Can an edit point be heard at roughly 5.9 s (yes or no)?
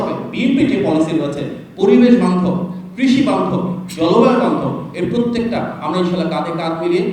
no